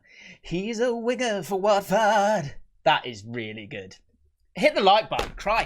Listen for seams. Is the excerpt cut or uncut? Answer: uncut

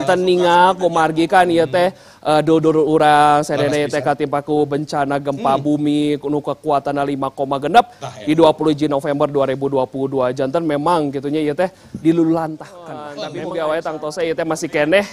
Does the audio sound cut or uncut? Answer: cut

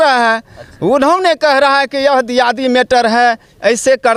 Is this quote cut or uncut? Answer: uncut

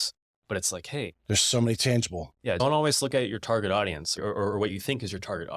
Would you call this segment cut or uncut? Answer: cut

